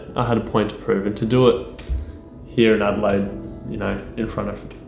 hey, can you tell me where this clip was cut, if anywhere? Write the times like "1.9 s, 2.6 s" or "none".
none